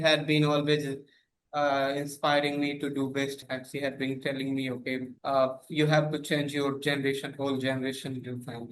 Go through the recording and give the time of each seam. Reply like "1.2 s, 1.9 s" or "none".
3.4 s, 5.1 s